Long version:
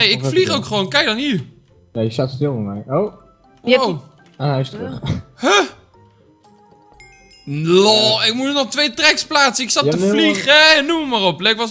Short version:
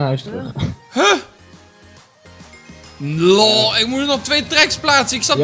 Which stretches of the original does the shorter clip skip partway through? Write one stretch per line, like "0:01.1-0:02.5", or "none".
none